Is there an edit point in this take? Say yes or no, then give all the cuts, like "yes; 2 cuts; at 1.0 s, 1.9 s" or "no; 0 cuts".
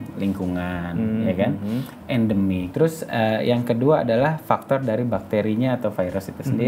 yes; 1 cut; at 2.7 s